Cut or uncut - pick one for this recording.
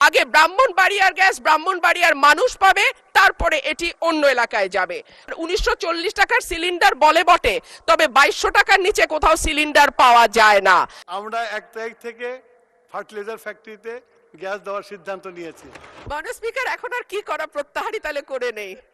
cut